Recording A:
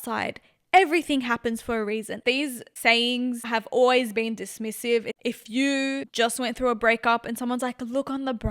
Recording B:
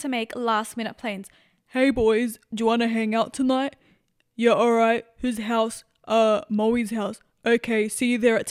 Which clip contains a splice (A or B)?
A